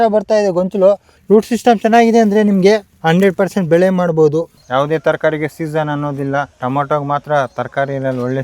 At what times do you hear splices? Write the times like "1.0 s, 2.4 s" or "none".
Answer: 1.1 s, 2.9 s, 4.6 s, 6.5 s